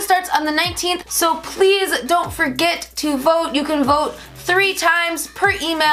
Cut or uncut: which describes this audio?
cut